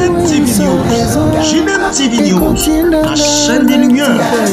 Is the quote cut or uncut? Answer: uncut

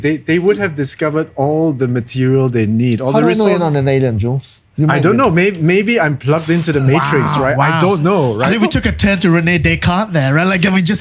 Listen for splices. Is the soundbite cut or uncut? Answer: uncut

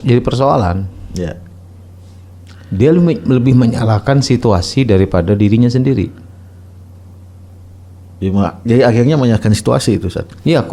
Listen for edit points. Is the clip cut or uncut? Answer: uncut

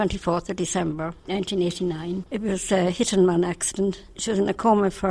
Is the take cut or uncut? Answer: cut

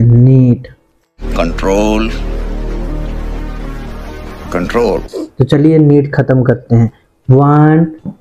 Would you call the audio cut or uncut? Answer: cut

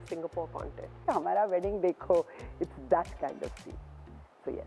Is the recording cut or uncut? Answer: cut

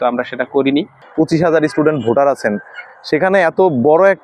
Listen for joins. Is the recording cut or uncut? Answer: cut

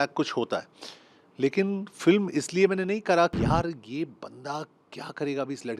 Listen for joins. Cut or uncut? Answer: cut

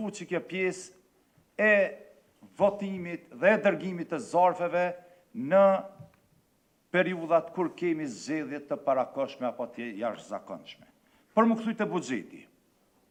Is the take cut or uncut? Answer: uncut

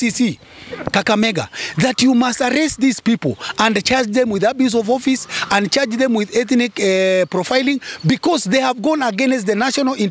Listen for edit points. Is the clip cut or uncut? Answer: uncut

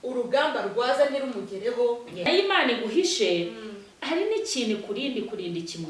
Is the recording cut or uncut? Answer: cut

